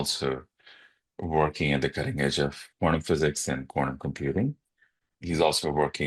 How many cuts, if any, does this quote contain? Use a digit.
2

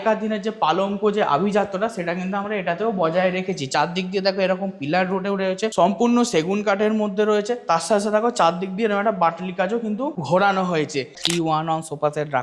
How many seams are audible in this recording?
3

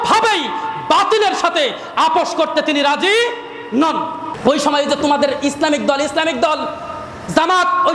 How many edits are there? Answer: 1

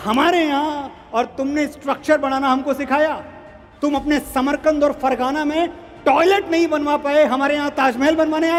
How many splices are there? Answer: 0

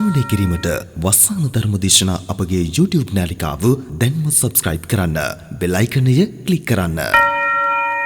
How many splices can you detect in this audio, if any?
1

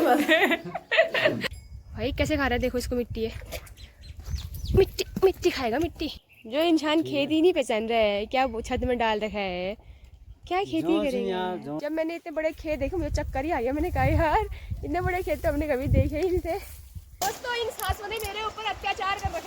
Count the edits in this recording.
4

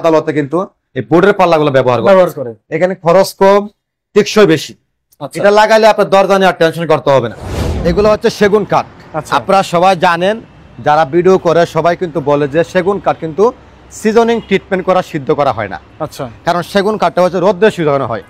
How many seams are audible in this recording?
1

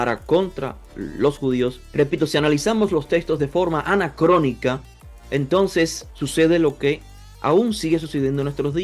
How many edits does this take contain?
1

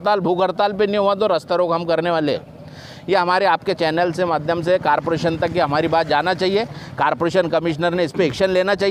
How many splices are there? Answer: 0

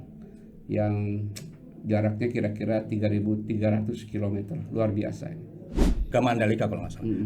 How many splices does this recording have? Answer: 1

